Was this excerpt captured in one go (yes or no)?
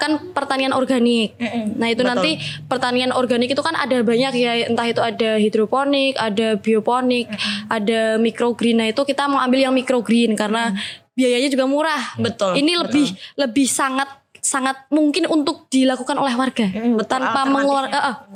yes